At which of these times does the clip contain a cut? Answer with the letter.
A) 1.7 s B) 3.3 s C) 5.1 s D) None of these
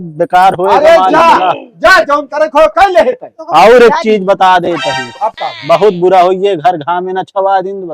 B